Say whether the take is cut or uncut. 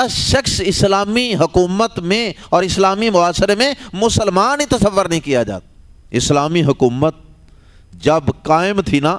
uncut